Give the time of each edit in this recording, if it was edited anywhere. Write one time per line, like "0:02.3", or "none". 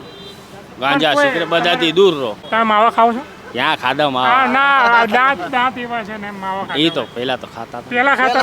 0:02.4